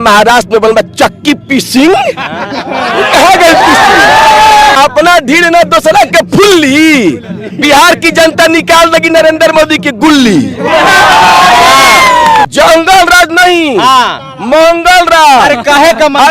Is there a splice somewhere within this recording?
yes; 2 cuts; at 4.8 s, 12.5 s

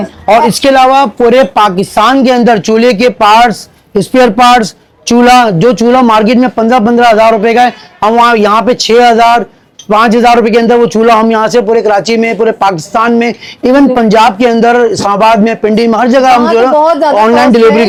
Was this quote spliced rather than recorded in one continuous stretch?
no; 0 cuts

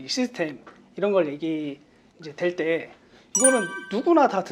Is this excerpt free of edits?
yes; 0 cuts

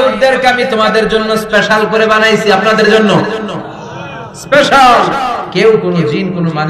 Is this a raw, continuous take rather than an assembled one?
no; 1 cut; at 5.4 s

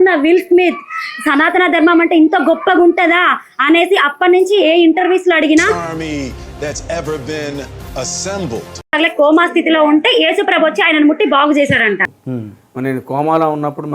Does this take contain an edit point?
yes; 2 cuts; at 5.8 s, 9.0 s

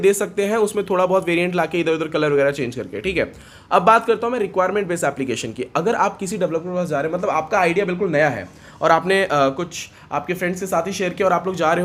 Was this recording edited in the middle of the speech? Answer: no; 0 cuts

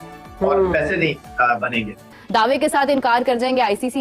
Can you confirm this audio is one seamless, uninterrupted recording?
no; 1 cut; at 2.1 s

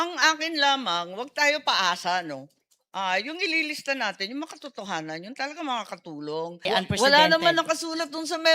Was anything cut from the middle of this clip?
yes; 1 cut; at 6.6 s

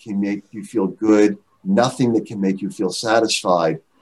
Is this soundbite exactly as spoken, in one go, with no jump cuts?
yes; 0 cuts

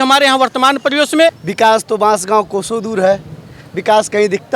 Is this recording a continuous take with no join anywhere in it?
no; 1 cut; at 1.4 s

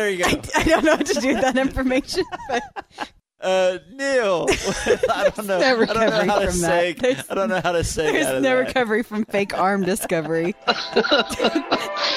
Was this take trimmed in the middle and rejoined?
no; 0 cuts

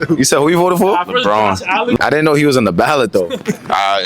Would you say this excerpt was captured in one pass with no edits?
no; 1 cut; at 2.0 s

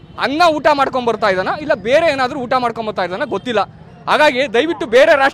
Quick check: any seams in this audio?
no; 0 cuts

